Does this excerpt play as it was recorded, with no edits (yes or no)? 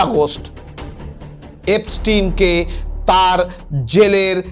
yes